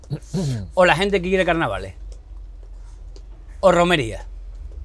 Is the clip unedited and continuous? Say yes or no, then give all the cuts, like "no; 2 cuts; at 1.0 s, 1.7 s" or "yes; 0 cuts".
yes; 0 cuts